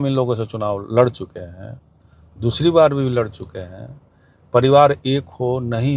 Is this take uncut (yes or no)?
yes